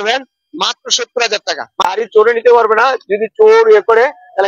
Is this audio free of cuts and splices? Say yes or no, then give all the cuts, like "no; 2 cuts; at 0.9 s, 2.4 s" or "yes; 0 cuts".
no; 1 cut; at 1.8 s